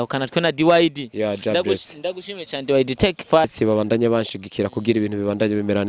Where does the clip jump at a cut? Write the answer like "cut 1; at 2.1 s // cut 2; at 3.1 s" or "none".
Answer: cut 1; at 3.4 s